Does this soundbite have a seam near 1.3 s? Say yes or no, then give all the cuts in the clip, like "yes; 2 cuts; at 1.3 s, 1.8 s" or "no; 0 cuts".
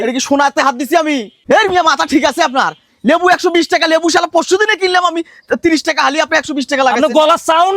yes; 1 cut; at 1.3 s